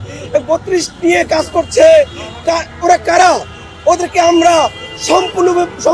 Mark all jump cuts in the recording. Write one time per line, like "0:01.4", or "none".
none